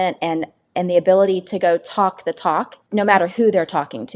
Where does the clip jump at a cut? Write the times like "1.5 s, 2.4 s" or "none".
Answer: 2.8 s